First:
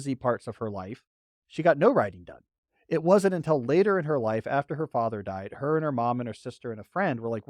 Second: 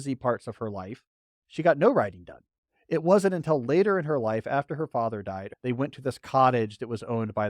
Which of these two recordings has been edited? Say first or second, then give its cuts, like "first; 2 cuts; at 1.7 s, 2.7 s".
second; 1 cut; at 5.5 s